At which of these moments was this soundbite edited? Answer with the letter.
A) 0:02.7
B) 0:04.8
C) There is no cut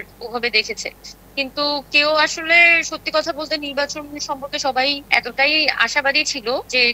C